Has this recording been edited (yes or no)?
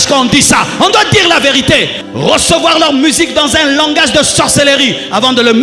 yes